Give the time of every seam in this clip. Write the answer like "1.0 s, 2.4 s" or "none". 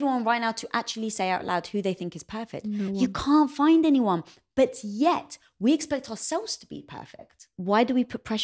2.6 s, 7.5 s